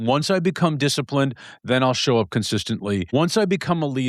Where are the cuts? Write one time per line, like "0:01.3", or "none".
0:03.1